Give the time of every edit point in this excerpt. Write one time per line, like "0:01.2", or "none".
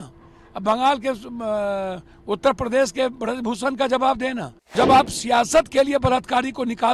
0:04.7

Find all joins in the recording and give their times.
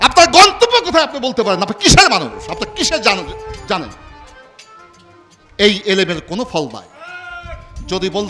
none

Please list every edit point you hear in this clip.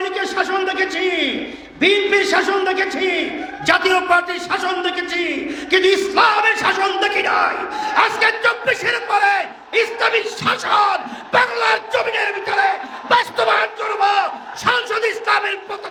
none

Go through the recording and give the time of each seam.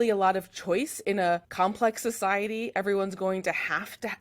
0:01.5

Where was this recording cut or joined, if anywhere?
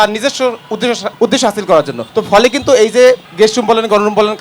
0:00.8
0:02.0
0:03.3

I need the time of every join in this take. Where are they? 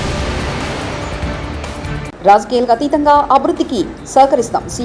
0:02.1

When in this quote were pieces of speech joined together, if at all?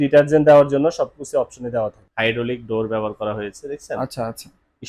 0:02.1

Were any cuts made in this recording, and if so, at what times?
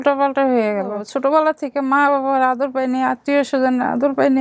0:01.1

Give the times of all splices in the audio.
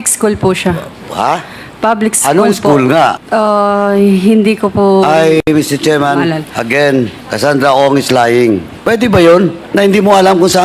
0:03.2
0:07.2
0:08.7
0:09.6

